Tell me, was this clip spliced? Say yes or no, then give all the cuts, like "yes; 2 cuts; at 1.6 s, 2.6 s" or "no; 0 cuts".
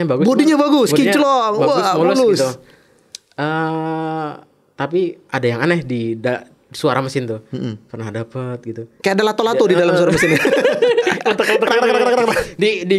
no; 0 cuts